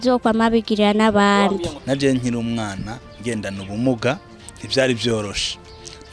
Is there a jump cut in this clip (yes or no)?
yes